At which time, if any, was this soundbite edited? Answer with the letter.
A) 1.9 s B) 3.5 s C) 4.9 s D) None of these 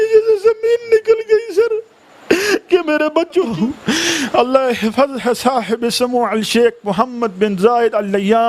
B